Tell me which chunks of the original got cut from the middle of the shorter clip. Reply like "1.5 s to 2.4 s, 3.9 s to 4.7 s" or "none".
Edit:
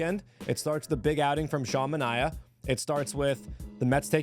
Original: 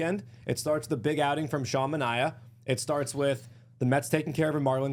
none